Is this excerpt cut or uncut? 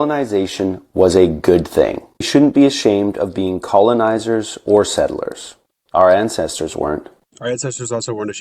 cut